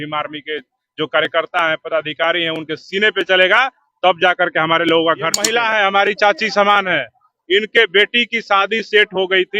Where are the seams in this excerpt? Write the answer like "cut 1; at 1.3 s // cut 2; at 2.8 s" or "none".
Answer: cut 1; at 5.5 s